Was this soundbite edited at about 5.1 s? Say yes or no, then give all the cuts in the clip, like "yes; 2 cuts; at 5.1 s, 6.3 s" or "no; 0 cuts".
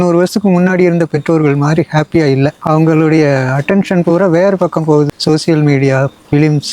yes; 1 cut; at 5.1 s